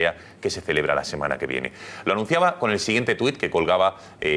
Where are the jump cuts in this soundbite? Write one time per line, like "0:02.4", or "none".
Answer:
0:01.4